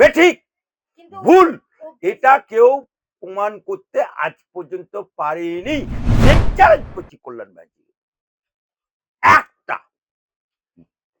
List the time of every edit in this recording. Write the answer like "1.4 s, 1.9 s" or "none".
6.3 s